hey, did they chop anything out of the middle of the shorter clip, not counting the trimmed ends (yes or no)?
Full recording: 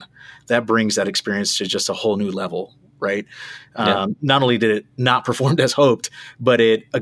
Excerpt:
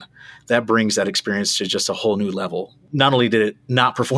yes